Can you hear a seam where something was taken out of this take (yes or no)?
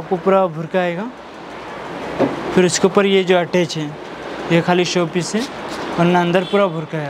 no